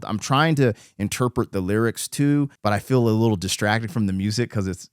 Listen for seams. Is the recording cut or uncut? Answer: cut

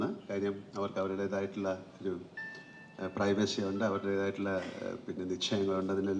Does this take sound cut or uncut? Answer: uncut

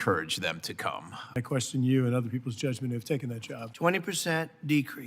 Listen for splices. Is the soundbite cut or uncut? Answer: cut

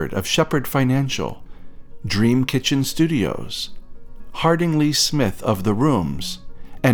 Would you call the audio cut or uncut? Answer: uncut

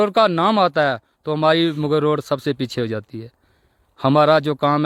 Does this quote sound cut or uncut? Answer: uncut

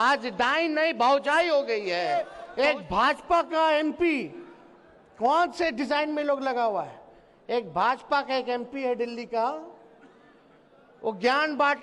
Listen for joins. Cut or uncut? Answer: cut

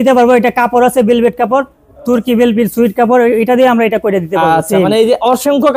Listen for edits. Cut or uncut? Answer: uncut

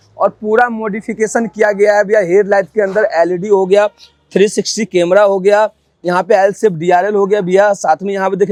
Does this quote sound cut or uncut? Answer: uncut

